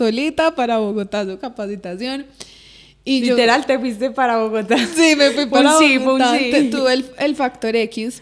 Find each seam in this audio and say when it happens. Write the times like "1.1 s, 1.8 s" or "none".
none